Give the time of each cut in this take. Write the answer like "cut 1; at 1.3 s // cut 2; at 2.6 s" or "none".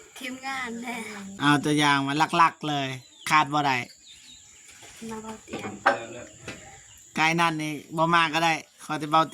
cut 1; at 1.3 s